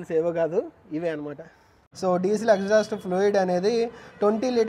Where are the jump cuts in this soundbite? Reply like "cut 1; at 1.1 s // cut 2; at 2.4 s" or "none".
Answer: cut 1; at 1.8 s